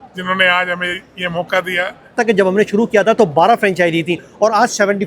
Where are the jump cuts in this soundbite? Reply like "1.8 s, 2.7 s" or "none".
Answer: 2.2 s